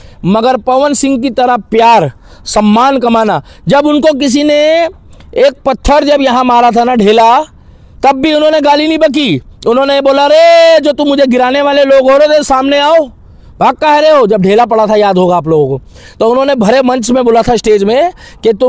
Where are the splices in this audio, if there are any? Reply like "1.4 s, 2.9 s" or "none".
none